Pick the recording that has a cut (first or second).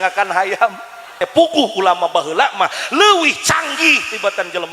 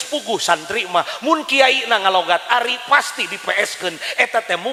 first